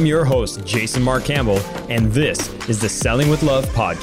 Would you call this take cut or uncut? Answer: uncut